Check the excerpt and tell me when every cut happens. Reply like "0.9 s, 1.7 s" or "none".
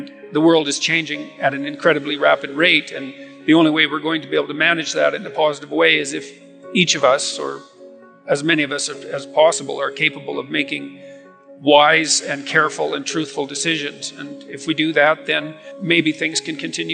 15.7 s